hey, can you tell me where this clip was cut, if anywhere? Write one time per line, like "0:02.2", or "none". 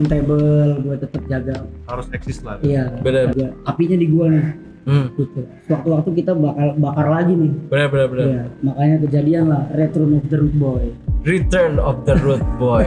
0:03.3